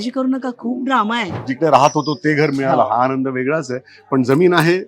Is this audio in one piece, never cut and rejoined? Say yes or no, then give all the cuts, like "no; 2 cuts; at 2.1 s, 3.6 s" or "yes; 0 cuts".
no; 1 cut; at 1.5 s